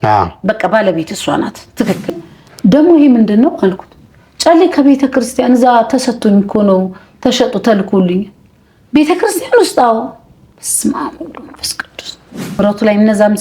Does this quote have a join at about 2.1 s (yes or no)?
yes